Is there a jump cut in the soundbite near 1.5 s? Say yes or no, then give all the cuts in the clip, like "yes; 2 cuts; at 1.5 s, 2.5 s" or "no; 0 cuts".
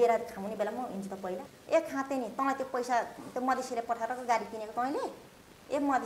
yes; 1 cut; at 1.5 s